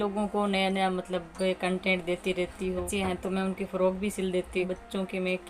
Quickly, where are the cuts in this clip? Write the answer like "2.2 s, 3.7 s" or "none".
2.9 s, 4.7 s